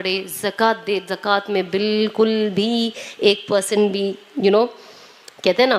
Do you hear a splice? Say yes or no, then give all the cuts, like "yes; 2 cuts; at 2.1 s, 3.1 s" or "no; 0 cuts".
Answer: no; 0 cuts